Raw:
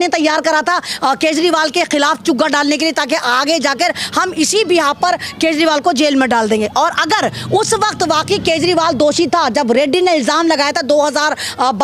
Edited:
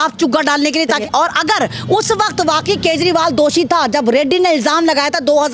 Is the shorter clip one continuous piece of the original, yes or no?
no